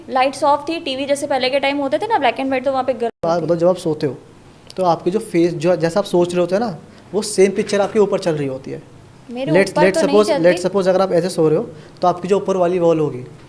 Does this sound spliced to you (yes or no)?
yes